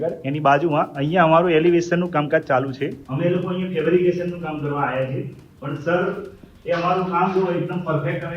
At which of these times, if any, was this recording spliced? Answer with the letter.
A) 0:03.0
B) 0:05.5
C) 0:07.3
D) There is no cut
A